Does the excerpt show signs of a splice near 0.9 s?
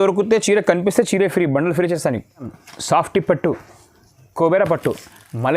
no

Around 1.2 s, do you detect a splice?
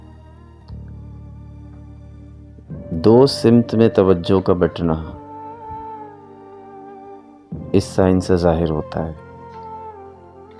no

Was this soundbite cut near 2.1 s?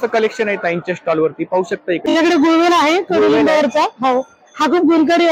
yes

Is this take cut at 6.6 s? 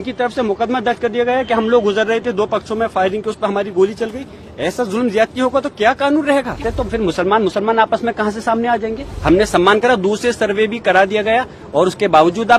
yes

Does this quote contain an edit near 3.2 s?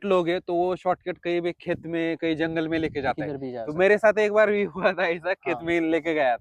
no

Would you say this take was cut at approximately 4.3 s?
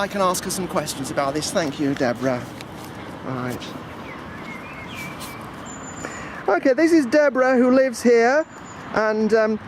yes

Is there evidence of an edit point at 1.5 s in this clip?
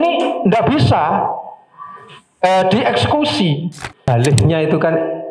no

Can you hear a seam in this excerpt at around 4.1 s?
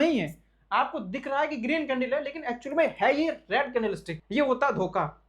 yes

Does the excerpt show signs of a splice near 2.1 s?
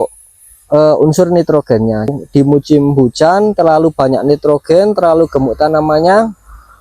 yes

